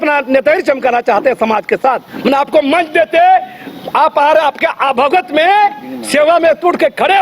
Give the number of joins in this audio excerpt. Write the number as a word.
one